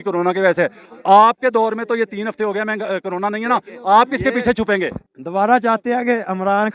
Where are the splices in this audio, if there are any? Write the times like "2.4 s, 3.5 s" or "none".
5.0 s